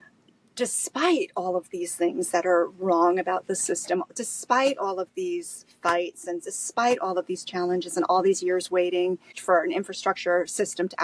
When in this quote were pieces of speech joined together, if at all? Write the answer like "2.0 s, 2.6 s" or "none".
9.3 s